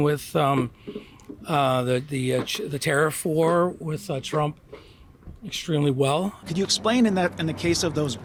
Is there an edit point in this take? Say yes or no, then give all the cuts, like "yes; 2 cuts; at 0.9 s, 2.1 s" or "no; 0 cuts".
no; 0 cuts